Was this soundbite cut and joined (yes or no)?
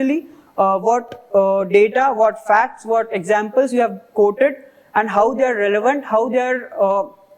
no